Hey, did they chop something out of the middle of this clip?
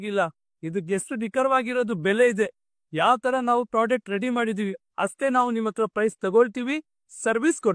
no; 0 cuts

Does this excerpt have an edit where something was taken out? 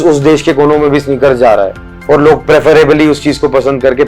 no; 0 cuts

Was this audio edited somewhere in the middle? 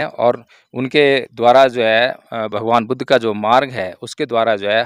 no; 0 cuts

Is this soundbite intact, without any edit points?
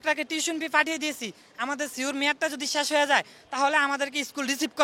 yes; 0 cuts

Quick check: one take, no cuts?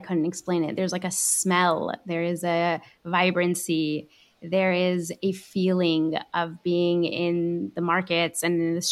yes; 0 cuts

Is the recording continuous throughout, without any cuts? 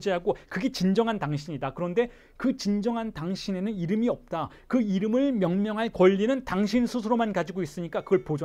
yes; 0 cuts

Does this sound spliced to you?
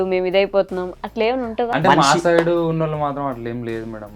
yes; 1 cut; at 1.7 s

